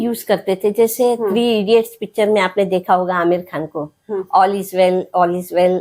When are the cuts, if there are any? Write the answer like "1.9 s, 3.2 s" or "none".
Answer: none

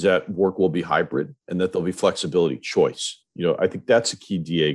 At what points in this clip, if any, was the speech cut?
1.4 s

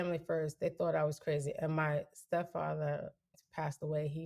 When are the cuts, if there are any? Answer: 3.3 s

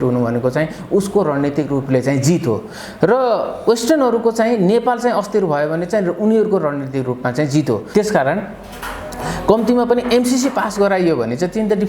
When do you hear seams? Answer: 7.8 s

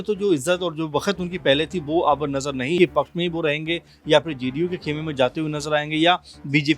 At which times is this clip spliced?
2.8 s

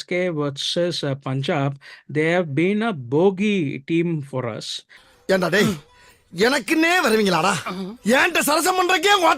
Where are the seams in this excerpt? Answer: 4.9 s

